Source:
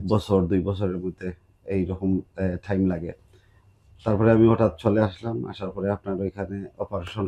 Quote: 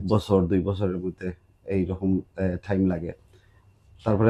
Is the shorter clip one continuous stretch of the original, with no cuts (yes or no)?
yes